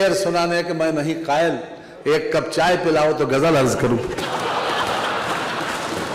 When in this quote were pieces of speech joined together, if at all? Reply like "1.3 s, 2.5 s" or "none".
none